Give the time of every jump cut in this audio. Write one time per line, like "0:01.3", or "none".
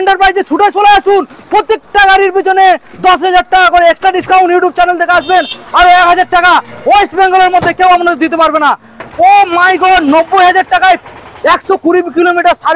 0:08.8